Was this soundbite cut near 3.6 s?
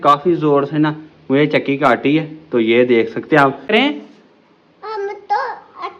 yes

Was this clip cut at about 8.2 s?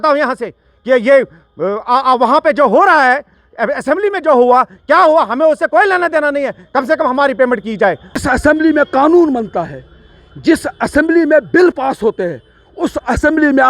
yes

